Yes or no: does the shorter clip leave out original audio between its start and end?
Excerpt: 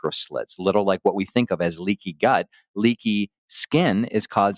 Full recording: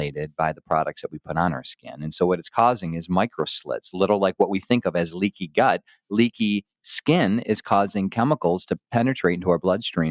no